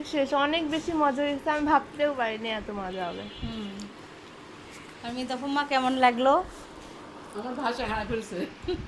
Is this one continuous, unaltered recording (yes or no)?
yes